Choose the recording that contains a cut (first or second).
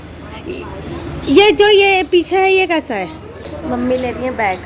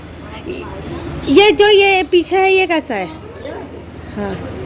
first